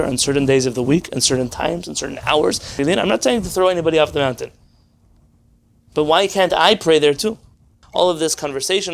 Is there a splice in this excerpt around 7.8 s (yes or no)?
yes